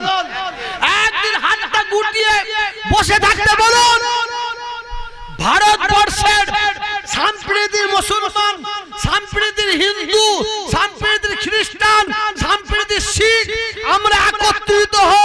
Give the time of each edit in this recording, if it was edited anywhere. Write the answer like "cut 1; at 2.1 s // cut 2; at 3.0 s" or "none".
none

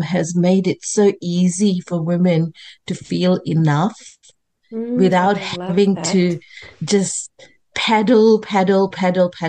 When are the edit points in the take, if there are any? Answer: none

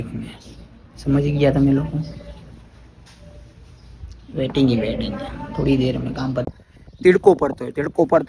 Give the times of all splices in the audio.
cut 1; at 6.5 s

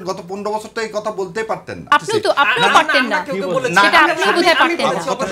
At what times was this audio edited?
cut 1; at 1.9 s

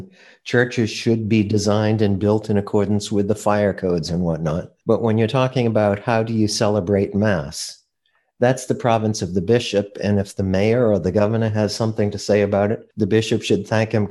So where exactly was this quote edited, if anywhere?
cut 1; at 4.7 s // cut 2; at 12.9 s

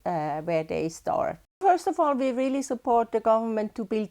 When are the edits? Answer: cut 1; at 1.6 s

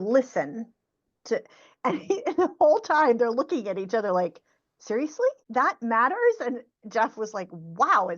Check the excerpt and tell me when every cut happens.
cut 1; at 5.4 s

